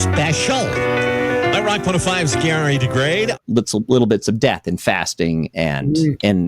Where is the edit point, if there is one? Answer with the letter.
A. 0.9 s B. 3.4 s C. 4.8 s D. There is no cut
B